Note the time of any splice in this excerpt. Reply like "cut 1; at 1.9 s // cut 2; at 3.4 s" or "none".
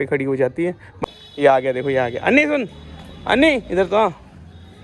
cut 1; at 1.0 s